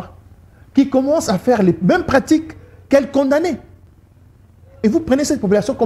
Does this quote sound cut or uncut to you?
uncut